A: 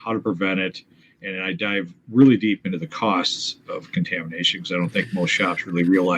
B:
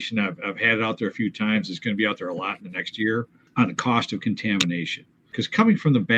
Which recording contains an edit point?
B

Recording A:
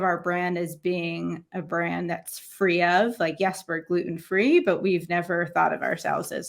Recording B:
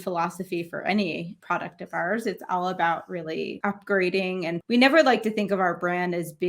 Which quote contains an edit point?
B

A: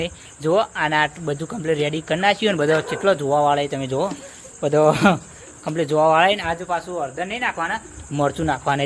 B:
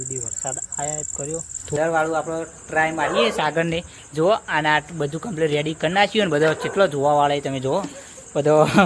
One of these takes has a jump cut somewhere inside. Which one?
B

